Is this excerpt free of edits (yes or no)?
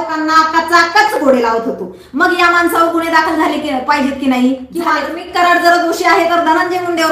no